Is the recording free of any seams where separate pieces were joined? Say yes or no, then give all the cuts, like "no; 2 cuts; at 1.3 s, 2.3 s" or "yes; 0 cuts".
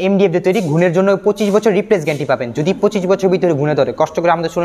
yes; 0 cuts